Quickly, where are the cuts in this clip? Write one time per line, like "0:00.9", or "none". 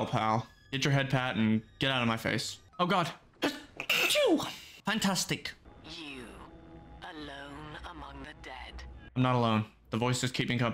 0:05.6
0:09.1